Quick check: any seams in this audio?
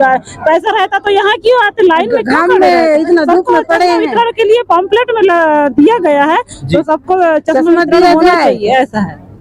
no; 0 cuts

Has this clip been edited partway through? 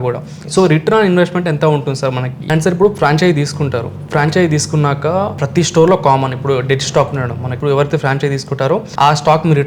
yes; 4 cuts; at 2.4 s, 5.4 s, 7.5 s, 8.9 s

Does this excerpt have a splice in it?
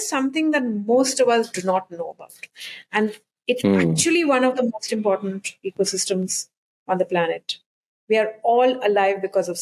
no; 0 cuts

